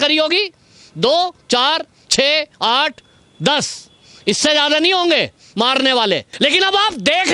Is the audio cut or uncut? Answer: cut